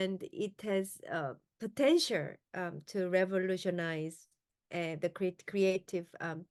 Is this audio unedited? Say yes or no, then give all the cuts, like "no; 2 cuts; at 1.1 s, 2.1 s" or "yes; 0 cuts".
yes; 0 cuts